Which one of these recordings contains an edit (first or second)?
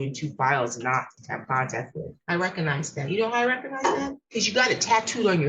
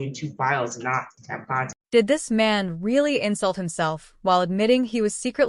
first